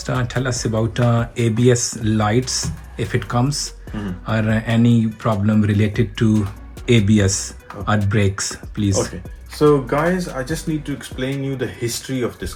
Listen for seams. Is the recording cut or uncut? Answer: uncut